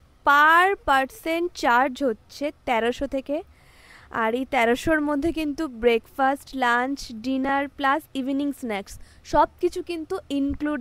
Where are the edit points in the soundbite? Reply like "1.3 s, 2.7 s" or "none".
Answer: none